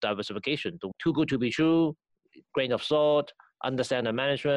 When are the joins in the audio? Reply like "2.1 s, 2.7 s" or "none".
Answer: 0.9 s